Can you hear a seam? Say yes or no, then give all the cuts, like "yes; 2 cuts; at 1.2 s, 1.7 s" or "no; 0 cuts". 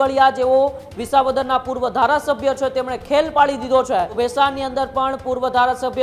yes; 1 cut; at 4.1 s